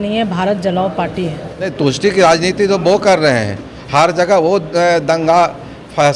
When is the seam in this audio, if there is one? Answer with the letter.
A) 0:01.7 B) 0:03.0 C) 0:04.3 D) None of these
A